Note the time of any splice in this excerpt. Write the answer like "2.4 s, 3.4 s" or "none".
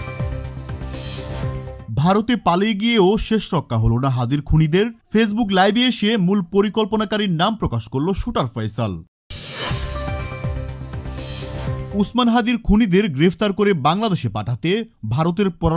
none